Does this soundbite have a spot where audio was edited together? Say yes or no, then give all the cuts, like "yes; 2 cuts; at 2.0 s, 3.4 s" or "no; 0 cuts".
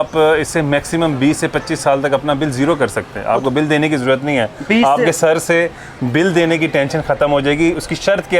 no; 0 cuts